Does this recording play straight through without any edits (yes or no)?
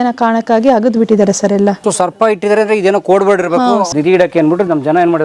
no